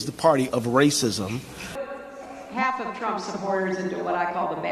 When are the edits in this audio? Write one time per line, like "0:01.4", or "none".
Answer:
0:01.8